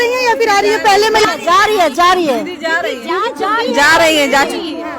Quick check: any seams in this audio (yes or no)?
yes